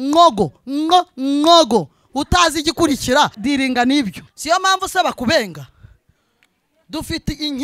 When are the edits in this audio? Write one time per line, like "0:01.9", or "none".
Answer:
0:03.4
0:04.3